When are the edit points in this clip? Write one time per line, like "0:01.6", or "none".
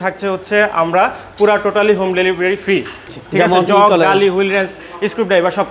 0:03.0